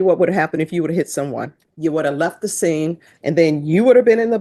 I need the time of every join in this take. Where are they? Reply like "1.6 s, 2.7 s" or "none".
1.6 s, 3.1 s